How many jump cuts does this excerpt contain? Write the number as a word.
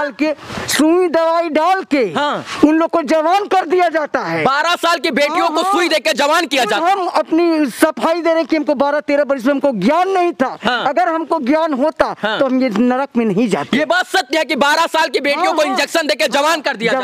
zero